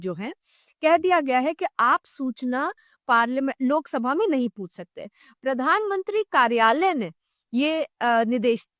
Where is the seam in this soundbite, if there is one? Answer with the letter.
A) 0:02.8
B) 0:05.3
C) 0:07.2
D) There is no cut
D